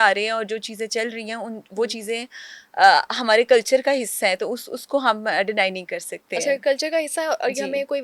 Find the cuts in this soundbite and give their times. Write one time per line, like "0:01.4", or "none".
none